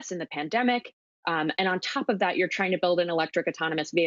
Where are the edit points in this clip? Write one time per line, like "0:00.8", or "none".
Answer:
none